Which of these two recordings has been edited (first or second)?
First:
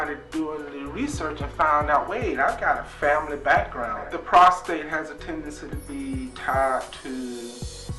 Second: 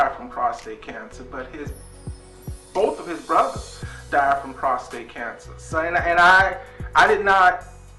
first